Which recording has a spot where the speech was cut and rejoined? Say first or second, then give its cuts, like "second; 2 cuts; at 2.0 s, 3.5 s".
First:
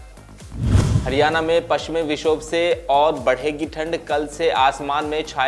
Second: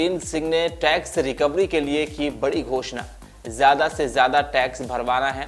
first; 1 cut; at 1.0 s